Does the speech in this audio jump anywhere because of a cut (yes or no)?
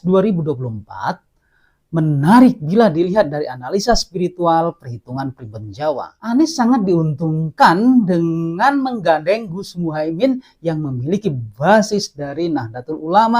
yes